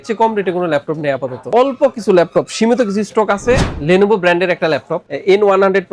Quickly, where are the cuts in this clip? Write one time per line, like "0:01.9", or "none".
0:01.5
0:03.7